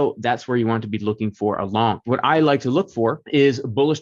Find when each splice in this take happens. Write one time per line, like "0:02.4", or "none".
0:02.1
0:03.2